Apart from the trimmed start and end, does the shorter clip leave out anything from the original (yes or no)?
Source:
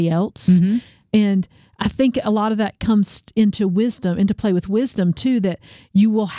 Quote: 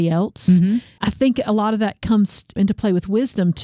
yes